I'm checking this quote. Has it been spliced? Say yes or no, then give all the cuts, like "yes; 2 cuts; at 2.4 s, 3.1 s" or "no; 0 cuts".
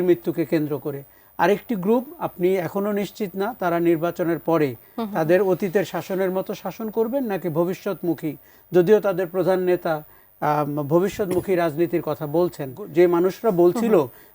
yes; 1 cut; at 12.8 s